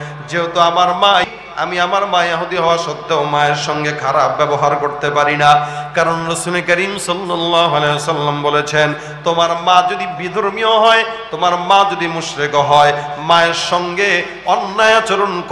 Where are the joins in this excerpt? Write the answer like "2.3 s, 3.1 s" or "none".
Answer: 1.3 s